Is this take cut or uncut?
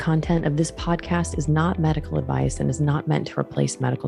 uncut